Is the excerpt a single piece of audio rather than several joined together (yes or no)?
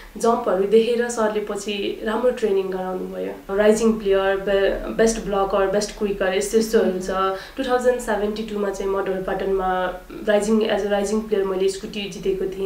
no